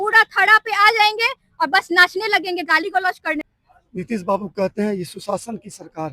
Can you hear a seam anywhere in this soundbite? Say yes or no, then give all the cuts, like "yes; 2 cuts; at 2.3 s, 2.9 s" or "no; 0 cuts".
yes; 1 cut; at 3.4 s